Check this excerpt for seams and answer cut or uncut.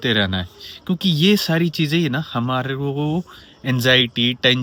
uncut